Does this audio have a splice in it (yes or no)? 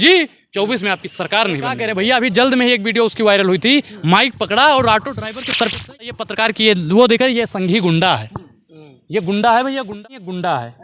yes